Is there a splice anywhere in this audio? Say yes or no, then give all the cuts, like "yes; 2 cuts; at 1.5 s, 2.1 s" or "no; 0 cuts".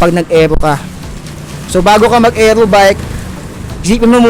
no; 0 cuts